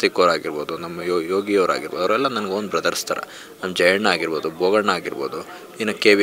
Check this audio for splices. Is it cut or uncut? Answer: uncut